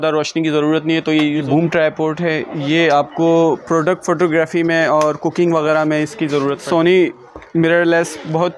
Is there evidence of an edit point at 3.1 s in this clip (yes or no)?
no